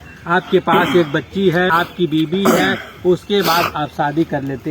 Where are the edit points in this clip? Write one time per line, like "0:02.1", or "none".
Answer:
0:01.8

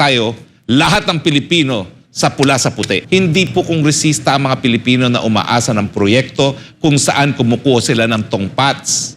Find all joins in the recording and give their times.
0:03.0

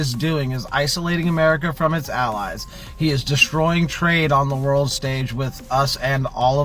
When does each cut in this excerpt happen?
none

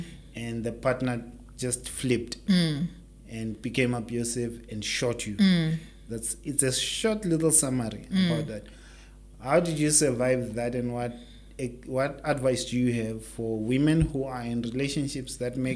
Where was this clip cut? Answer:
none

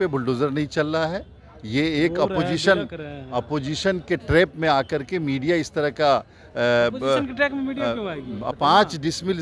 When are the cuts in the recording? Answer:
0:08.5

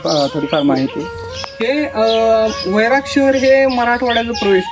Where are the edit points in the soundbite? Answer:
none

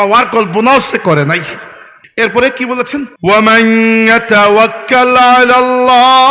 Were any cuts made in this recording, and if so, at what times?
none

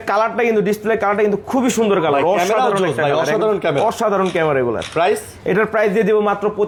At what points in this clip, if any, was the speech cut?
none

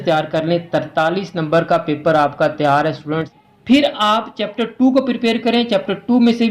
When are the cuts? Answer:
0:03.2

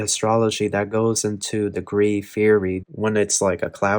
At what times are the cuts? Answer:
0:02.8

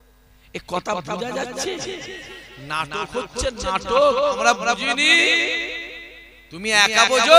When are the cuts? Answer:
none

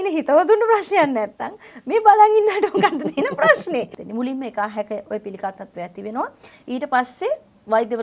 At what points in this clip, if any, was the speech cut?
0:04.0

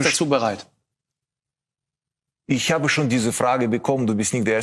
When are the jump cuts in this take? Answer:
none

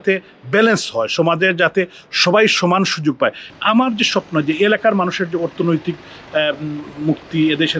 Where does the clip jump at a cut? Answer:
0:03.4

